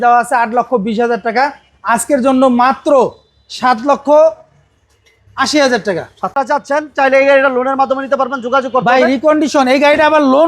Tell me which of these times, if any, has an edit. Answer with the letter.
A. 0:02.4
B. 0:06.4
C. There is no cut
B